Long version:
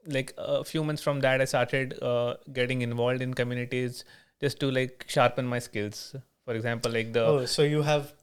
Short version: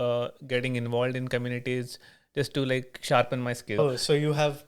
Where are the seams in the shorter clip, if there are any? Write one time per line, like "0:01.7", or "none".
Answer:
0:03.8

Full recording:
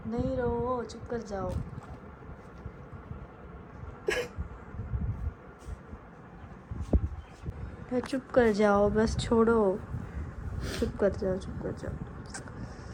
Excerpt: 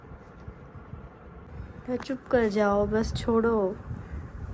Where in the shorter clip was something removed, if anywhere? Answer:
0:01.5

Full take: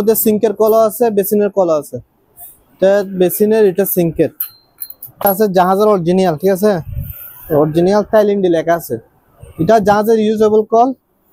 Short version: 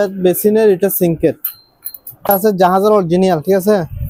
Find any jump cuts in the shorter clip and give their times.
none

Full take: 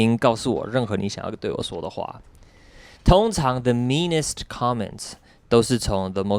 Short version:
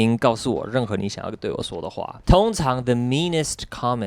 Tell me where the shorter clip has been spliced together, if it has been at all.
0:02.2

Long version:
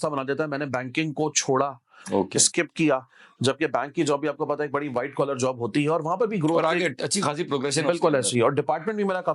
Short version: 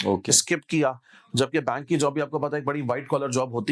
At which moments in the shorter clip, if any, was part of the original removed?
none

